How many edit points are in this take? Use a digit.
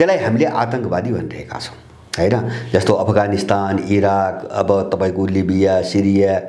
0